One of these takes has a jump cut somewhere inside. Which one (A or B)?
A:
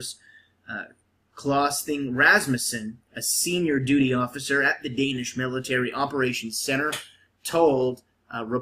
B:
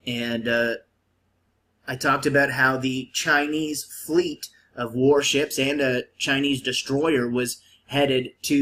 B